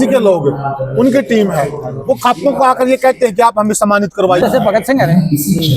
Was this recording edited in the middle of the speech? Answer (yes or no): yes